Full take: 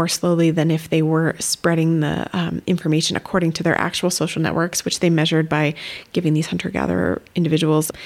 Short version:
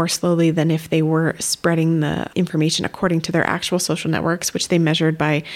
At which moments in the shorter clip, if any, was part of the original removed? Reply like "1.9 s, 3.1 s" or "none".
2.3 s